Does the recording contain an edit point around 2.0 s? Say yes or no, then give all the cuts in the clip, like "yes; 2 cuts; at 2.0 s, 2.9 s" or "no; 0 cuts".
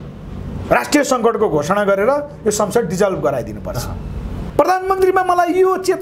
no; 1 cut; at 4.3 s